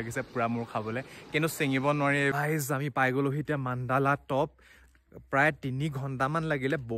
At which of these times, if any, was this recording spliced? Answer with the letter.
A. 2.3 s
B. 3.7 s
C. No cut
A